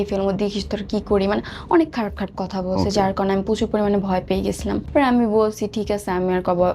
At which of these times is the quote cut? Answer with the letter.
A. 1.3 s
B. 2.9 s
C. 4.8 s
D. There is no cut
C